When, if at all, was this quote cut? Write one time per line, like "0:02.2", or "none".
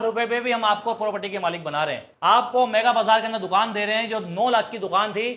0:02.1